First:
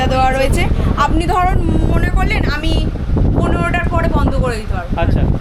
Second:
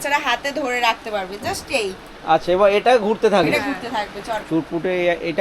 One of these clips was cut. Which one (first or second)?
second